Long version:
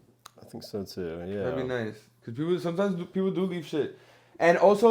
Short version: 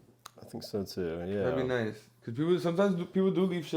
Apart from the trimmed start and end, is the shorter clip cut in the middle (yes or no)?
no